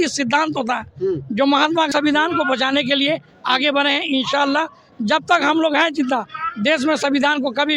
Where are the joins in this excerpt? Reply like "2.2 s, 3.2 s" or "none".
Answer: 1.9 s